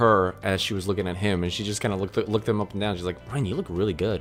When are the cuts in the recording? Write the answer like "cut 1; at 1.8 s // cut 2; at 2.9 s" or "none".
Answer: none